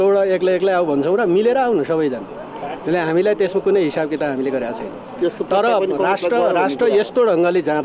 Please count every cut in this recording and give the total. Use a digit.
0